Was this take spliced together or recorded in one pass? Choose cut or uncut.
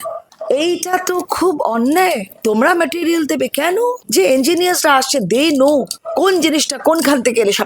uncut